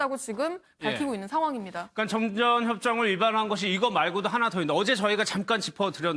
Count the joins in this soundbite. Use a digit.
1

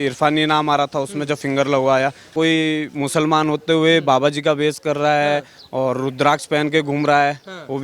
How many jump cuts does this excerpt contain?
1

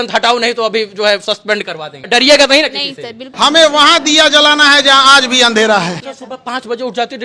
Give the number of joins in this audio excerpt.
3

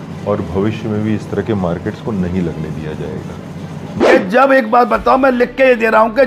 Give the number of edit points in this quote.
1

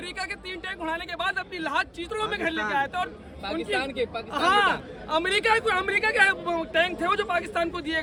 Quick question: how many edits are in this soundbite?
0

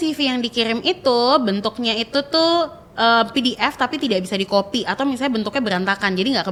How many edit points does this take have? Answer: 0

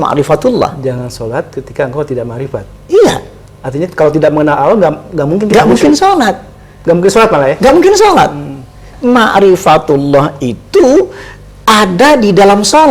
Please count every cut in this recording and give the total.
1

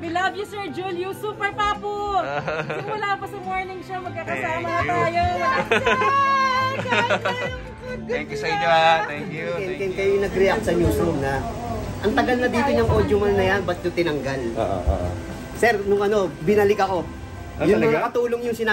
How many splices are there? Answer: 1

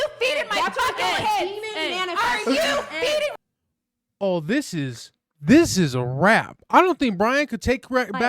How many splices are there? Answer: 1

